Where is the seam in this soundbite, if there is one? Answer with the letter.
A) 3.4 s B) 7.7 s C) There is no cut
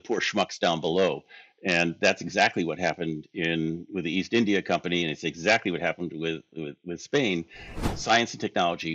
B